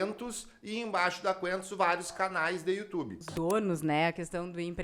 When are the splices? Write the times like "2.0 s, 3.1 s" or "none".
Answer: 3.2 s